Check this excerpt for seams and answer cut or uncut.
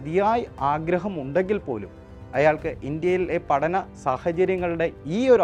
uncut